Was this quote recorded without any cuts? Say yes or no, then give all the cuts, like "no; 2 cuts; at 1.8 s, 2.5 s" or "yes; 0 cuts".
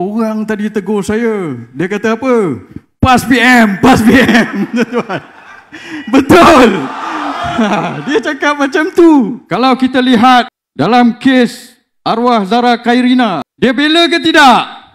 no; 3 cuts; at 9.4 s, 10.6 s, 13.5 s